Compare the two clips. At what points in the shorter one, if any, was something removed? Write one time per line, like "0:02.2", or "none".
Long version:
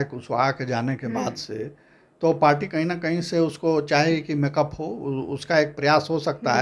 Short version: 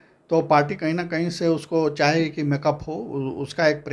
none